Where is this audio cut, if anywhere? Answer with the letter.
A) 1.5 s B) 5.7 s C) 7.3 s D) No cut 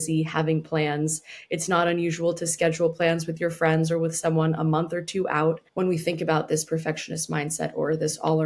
B